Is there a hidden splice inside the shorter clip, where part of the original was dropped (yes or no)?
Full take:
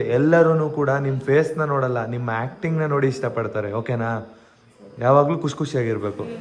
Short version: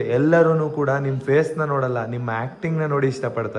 no